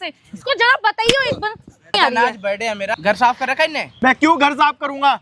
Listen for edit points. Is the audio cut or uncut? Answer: cut